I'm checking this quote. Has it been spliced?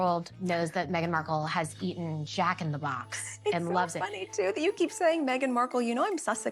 no; 0 cuts

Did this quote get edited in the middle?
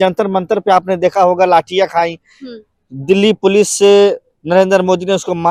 no; 0 cuts

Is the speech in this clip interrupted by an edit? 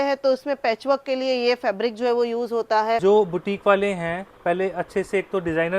yes; 1 cut; at 3.0 s

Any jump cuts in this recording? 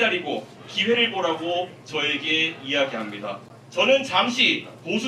yes; 1 cut; at 3.5 s

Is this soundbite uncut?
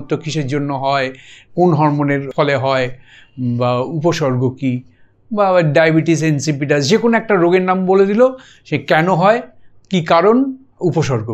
no; 1 cut; at 2.3 s

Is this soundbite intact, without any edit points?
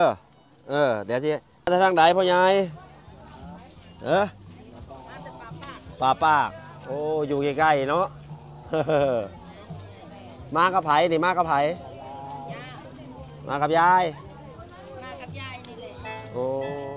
no; 1 cut; at 1.7 s

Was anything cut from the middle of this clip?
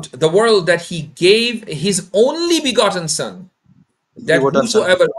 no; 0 cuts

